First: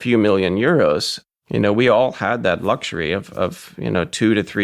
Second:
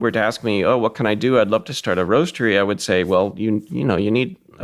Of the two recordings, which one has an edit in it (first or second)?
first